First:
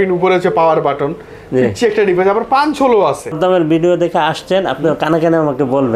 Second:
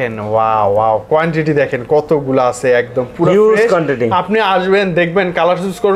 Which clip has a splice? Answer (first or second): first